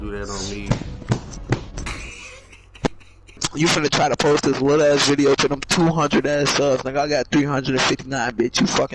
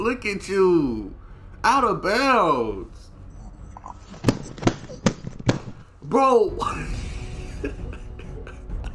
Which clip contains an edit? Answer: first; 1 cut; at 3.4 s

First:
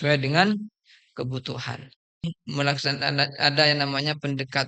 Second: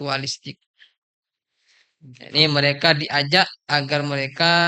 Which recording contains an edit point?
first; 1 cut; at 2.2 s

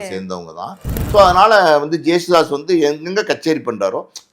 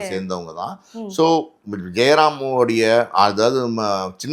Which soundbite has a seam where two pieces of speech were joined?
first; 1 cut; at 0.9 s

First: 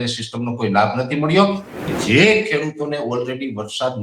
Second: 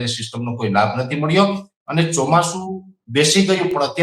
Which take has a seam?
first; 1 cut; at 1.9 s

